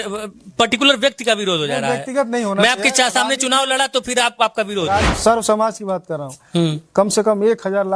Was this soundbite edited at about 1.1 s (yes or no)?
no